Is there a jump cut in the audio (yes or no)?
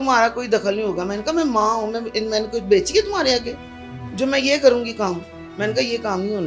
no